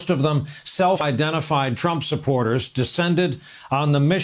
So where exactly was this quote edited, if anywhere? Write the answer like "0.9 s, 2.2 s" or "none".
1.0 s